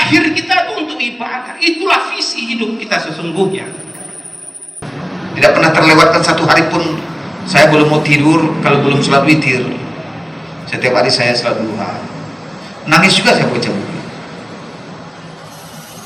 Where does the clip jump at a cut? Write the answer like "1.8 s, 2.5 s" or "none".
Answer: 4.9 s

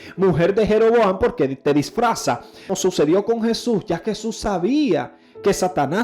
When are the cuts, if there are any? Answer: 2.7 s

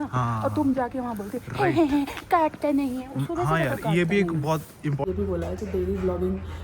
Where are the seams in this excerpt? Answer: 5.0 s

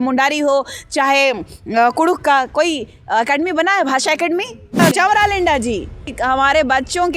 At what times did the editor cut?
4.8 s, 6.1 s

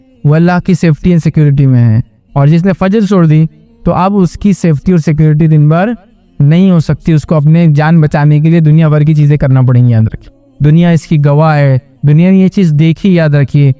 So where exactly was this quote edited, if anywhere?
10.4 s

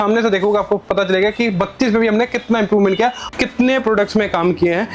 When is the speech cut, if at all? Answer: 3.3 s

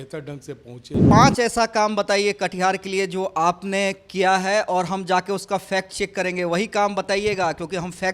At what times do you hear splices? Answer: 1.0 s

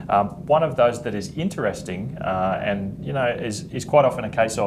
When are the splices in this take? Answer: none

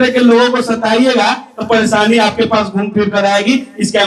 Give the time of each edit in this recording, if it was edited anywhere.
none

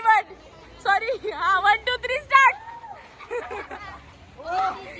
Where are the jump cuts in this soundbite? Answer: 3.8 s

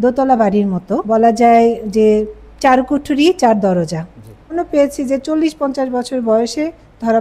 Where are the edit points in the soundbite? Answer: 1.0 s, 4.5 s

